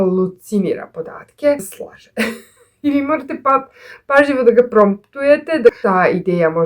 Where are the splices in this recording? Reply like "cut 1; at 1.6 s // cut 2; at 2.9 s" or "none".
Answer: cut 1; at 1.7 s // cut 2; at 5.8 s